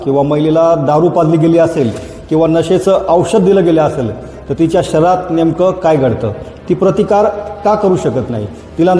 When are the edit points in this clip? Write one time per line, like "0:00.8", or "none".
none